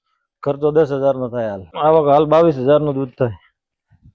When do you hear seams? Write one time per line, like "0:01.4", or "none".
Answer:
0:01.6